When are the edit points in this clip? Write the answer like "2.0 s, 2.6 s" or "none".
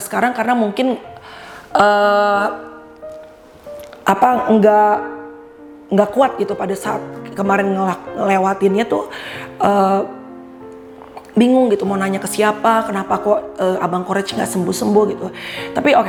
none